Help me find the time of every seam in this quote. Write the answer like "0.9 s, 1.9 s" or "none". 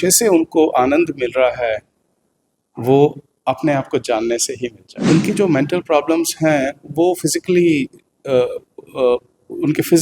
4.9 s